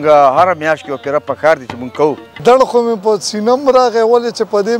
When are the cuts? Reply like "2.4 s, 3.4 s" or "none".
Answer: 2.4 s